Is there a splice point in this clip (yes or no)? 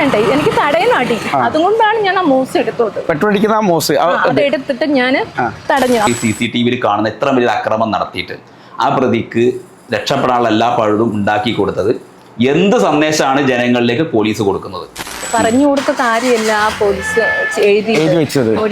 yes